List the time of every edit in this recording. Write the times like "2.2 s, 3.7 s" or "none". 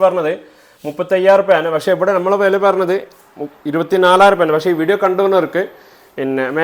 none